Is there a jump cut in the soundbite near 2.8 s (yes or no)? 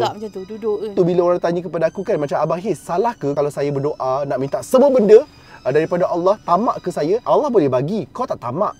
no